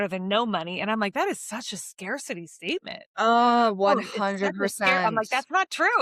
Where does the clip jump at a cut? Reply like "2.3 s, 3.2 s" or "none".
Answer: none